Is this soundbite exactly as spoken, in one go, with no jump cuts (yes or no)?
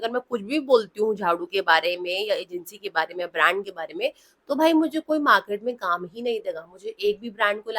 yes